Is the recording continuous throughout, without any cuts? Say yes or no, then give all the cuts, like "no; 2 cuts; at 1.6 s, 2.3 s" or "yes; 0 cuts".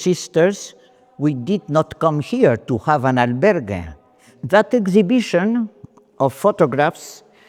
no; 1 cut; at 4.4 s